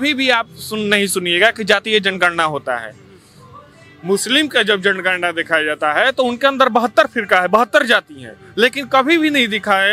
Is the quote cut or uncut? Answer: uncut